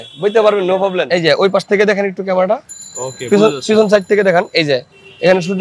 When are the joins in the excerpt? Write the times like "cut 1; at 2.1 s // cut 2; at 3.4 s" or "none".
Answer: cut 1; at 1.1 s